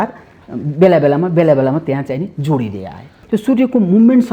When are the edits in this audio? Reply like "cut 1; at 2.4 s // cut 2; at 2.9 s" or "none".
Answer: cut 1; at 3.2 s